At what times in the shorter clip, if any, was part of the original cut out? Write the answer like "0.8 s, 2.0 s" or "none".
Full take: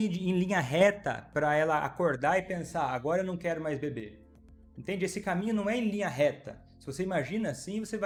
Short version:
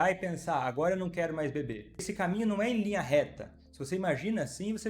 2.1 s